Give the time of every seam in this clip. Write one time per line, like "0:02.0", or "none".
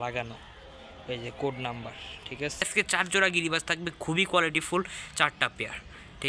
0:02.6

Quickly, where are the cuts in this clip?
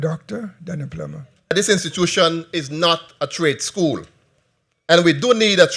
0:01.5

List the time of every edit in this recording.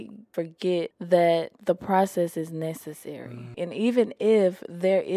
0:01.0
0:01.5
0:03.6

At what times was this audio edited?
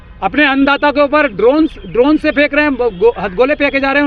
none

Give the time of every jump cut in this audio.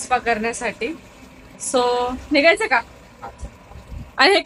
none

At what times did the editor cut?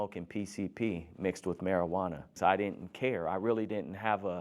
0:02.3

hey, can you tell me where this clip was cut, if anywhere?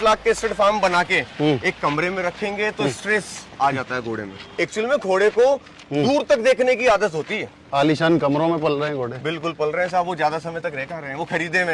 0:04.4
0:07.6

